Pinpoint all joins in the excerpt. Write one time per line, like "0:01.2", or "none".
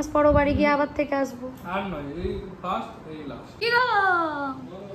0:03.4